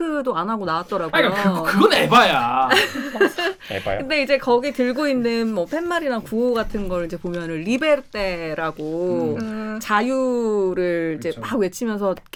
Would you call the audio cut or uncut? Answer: uncut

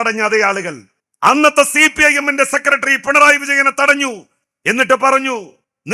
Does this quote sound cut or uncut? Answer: uncut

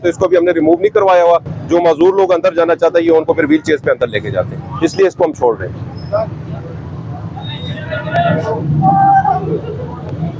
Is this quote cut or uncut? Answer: uncut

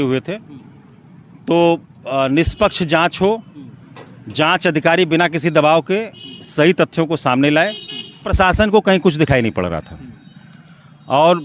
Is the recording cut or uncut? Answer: cut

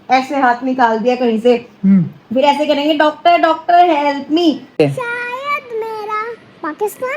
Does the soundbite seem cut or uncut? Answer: cut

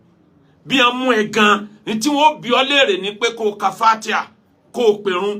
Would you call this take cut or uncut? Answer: uncut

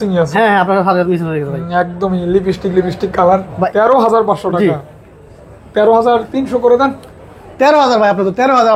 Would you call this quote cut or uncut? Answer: cut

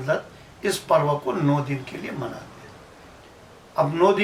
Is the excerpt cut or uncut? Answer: uncut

